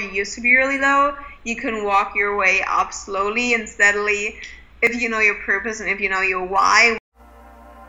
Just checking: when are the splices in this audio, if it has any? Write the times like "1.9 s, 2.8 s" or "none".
7.0 s